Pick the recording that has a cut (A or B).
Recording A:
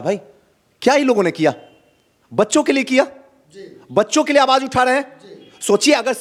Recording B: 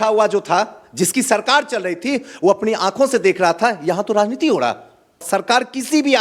B